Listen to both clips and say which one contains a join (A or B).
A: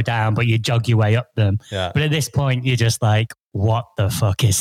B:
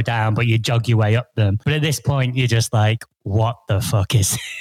B